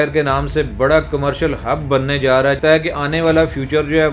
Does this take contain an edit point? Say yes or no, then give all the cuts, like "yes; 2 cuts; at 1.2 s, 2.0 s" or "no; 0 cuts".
yes; 1 cut; at 2.6 s